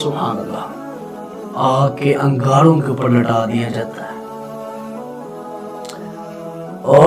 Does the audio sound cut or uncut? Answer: cut